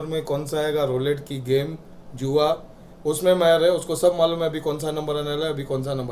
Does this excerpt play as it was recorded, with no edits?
yes; 0 cuts

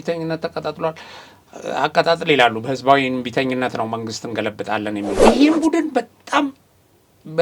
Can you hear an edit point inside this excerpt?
yes; 1 cut; at 5.2 s

